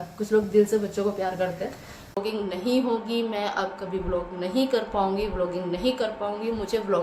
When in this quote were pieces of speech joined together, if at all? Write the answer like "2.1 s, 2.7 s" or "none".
2.2 s